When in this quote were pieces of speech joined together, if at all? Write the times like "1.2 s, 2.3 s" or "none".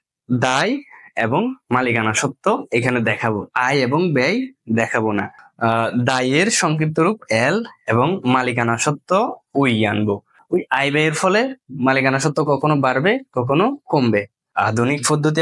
5.4 s, 10.3 s, 14.4 s

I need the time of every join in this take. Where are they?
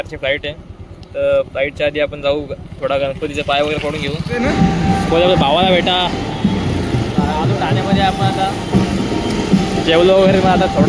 4.2 s

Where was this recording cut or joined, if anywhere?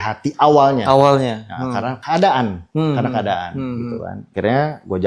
2.6 s, 4.2 s

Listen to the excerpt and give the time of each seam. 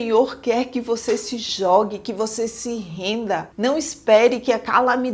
3.5 s

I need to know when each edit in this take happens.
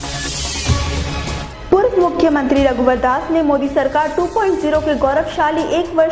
1.2 s

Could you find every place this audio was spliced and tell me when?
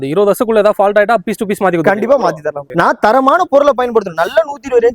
2.6 s

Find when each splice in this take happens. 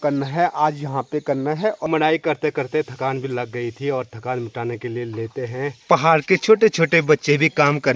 1.8 s, 5.8 s

